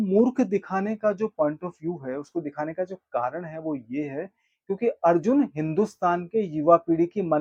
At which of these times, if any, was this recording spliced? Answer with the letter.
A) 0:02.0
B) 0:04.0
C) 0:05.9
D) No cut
D